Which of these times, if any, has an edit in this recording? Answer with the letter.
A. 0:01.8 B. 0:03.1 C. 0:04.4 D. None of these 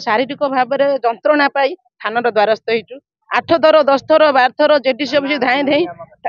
D